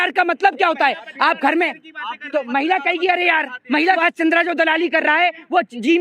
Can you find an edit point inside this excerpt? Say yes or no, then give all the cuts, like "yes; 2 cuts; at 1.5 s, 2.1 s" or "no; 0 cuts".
yes; 1 cut; at 4.0 s